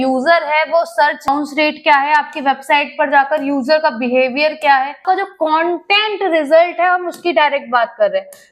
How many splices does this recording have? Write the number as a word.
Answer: two